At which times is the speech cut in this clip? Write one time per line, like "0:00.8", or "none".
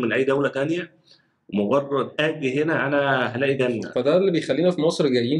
0:02.1
0:03.9